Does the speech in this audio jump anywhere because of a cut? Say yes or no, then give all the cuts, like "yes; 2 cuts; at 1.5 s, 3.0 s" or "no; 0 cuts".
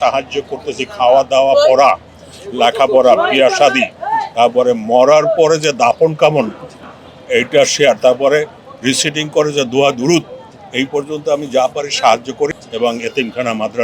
yes; 1 cut; at 12.6 s